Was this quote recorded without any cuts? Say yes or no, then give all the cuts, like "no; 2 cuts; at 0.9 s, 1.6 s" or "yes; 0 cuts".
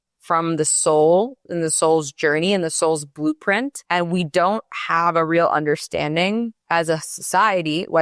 no; 1 cut; at 3.8 s